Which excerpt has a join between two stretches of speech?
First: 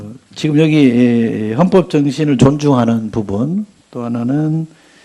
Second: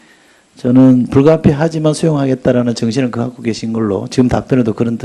first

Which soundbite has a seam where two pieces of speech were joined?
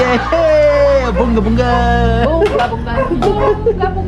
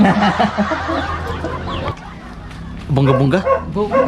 second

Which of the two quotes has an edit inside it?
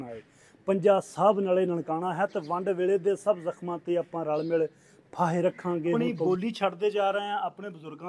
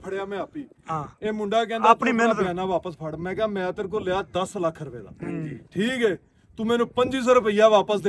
first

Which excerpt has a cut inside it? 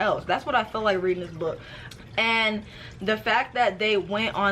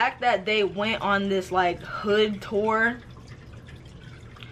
first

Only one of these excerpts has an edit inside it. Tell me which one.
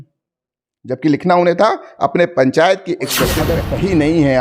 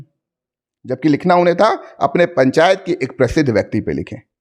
first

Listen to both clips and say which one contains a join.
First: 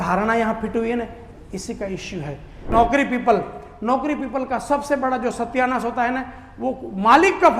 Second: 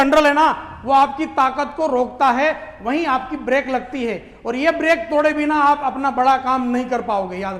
first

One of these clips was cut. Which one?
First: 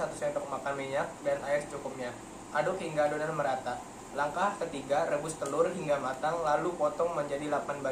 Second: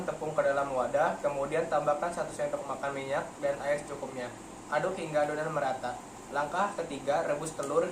second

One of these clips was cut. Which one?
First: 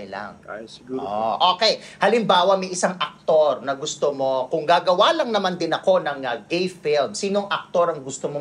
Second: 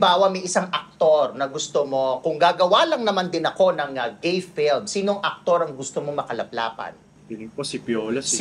second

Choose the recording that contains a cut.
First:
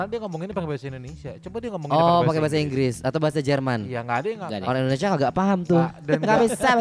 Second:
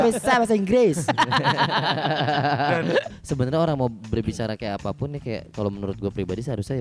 second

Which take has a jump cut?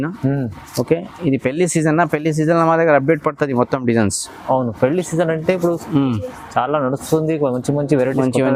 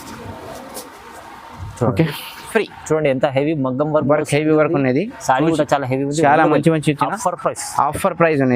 second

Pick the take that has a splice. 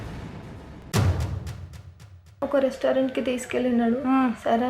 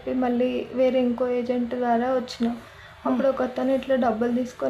first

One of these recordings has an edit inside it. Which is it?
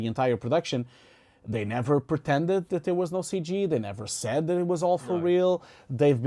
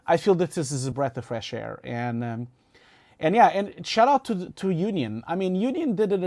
second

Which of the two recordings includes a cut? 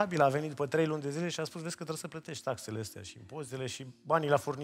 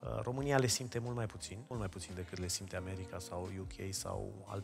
second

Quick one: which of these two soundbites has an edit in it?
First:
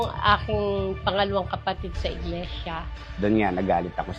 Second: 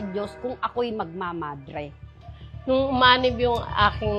second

